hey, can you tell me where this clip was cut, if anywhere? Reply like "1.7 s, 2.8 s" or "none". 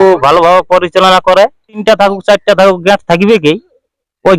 1.8 s